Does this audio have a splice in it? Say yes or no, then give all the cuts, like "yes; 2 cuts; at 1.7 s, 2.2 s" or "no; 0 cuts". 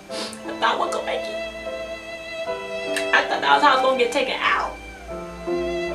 no; 0 cuts